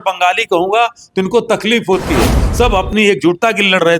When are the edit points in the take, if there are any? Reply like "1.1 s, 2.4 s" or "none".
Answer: 2.4 s